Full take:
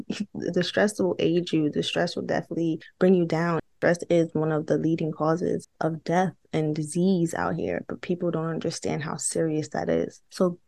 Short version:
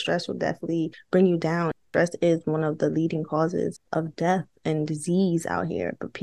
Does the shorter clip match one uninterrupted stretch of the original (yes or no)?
yes